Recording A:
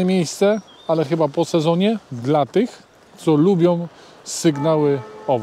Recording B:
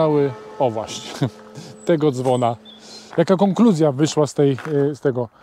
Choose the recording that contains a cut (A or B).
B